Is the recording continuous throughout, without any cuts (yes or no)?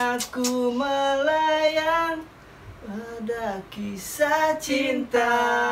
yes